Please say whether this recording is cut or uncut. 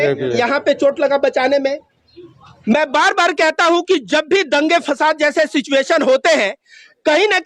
uncut